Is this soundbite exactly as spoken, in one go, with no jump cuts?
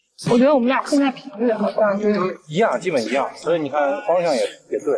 yes; 0 cuts

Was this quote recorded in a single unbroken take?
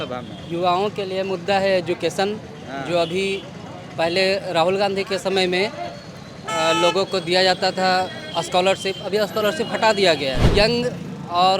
no; 1 cut; at 10.4 s

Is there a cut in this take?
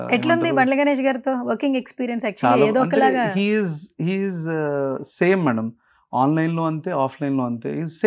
no; 0 cuts

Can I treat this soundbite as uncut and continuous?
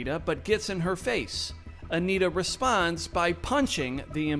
yes; 0 cuts

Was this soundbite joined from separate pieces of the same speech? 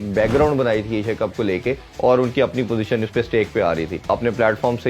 yes; 2 cuts; at 1.9 s, 4.1 s

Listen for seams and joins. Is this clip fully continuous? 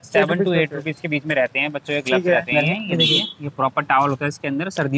no; 1 cut; at 2.5 s

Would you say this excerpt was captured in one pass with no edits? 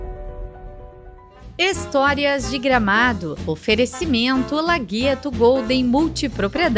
no; 1 cut; at 1.5 s

